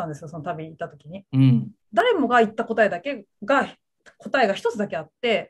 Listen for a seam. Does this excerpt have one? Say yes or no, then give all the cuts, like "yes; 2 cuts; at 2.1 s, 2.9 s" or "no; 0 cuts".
yes; 1 cut; at 2.0 s